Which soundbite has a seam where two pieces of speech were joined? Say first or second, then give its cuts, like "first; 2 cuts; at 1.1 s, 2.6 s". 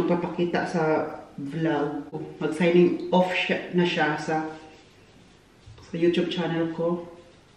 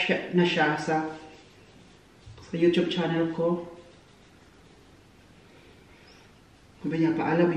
first; 1 cut; at 2.1 s